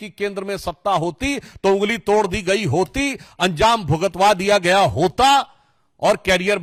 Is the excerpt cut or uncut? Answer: uncut